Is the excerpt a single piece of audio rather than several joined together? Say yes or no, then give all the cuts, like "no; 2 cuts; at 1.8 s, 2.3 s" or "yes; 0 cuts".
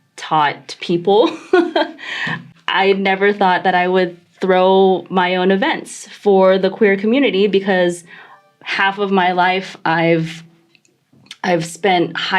no; 1 cut; at 2.4 s